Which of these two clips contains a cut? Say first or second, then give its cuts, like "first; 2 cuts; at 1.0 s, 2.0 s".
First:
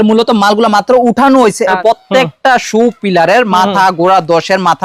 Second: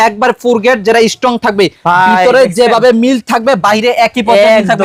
first; 1 cut; at 1.8 s